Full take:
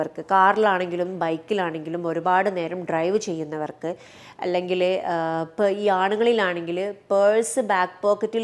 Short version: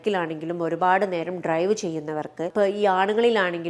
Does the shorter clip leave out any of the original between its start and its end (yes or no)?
yes